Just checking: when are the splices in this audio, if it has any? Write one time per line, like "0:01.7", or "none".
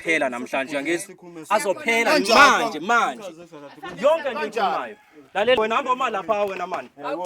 0:05.6